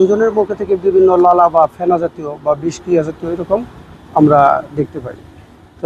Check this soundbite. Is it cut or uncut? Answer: uncut